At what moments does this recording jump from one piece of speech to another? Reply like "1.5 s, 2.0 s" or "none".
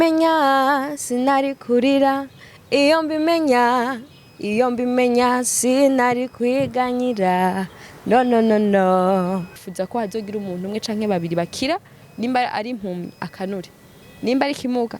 9.6 s